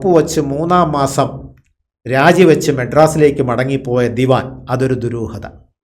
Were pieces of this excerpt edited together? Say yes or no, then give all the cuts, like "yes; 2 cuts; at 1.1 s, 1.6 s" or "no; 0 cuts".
no; 0 cuts